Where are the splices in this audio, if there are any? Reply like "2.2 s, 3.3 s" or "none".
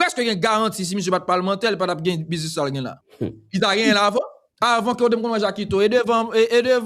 3.0 s, 4.4 s